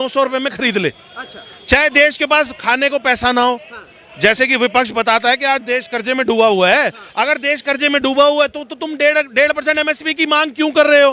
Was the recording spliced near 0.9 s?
no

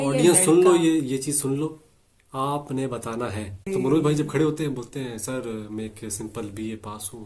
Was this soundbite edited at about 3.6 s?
yes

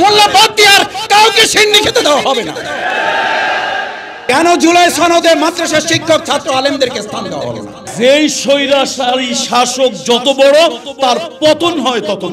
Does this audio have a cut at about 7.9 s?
yes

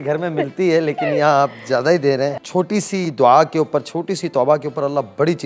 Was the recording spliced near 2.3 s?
yes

